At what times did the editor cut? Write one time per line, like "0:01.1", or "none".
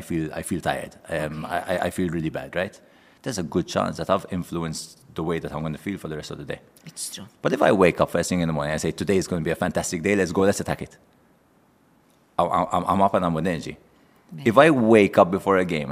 none